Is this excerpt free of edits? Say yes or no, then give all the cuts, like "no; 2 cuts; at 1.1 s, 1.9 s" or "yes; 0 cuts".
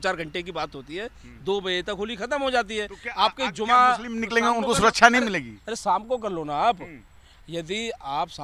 yes; 0 cuts